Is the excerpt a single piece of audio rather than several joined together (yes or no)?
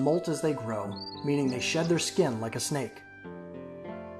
no